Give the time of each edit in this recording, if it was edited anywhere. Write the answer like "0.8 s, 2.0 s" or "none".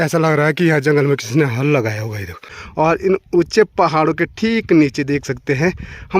2.6 s